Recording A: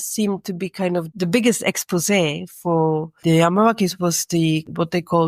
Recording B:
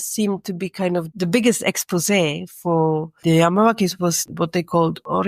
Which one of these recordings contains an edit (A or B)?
B